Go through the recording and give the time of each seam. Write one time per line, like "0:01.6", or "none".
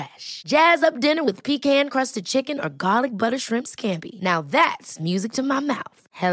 none